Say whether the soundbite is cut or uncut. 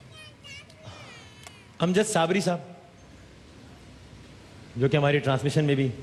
uncut